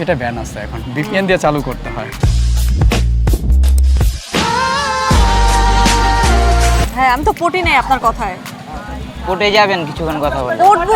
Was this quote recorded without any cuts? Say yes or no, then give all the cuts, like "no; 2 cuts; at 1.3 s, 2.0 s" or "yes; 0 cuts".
no; 1 cut; at 6.9 s